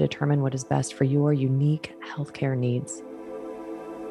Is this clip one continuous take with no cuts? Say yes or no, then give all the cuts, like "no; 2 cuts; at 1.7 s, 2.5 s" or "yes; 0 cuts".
no; 1 cut; at 2.9 s